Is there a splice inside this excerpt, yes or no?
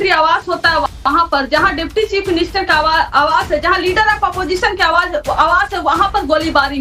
no